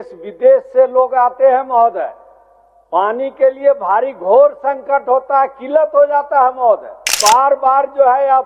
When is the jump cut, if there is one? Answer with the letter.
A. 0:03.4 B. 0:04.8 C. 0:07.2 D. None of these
C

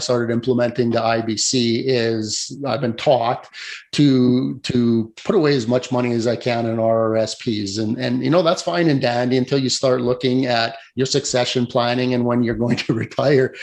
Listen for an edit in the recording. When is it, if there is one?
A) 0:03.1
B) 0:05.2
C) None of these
C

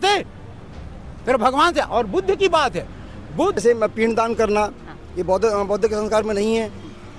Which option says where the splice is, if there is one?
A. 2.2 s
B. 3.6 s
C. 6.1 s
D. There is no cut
B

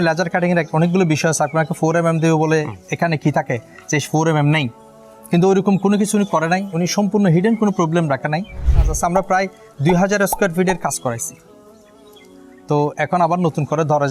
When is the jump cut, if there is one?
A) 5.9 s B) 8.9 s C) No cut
B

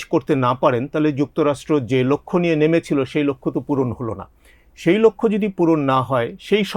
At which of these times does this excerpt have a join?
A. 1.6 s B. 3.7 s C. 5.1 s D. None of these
D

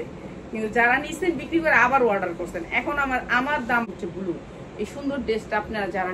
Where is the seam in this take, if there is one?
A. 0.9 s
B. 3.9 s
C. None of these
B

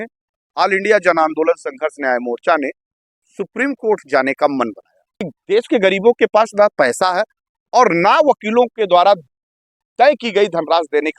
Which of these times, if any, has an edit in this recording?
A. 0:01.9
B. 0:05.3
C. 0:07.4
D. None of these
B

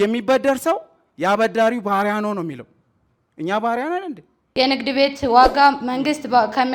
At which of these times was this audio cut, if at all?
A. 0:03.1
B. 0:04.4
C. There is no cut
B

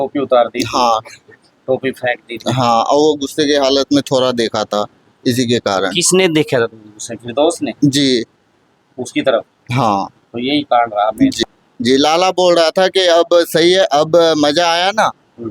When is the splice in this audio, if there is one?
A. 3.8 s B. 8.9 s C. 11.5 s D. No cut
C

